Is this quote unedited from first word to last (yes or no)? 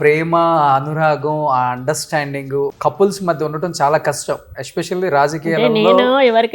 no